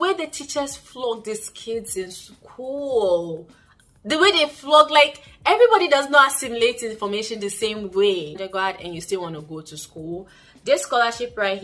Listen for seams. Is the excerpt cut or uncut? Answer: cut